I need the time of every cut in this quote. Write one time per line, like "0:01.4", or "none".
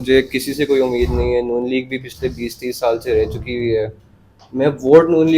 none